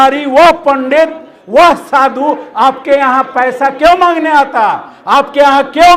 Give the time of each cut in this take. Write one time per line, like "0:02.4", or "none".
none